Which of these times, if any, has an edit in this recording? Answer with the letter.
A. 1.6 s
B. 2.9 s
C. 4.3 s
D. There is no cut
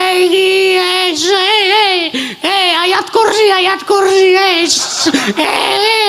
D